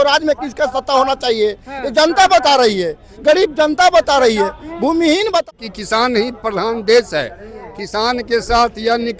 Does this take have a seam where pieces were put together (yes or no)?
yes